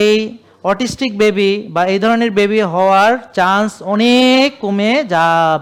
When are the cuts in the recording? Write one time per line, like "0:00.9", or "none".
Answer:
none